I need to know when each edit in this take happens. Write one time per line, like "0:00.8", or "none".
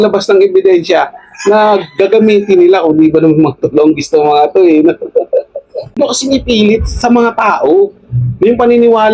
0:06.0